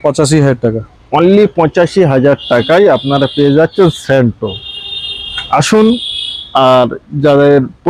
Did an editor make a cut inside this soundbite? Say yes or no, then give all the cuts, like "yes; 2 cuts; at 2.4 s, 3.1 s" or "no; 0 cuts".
no; 0 cuts